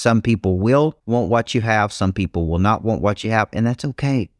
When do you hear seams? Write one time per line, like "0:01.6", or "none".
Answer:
0:01.0

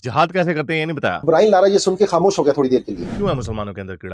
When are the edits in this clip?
0:03.0

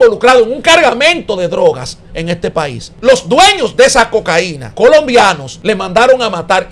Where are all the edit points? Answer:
0:02.8
0:04.6
0:05.5

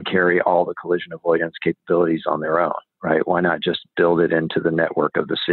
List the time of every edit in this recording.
none

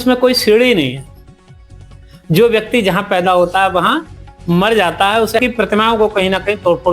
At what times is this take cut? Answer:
0:05.4

